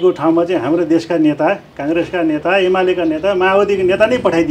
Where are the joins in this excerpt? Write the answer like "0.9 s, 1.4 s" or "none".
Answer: none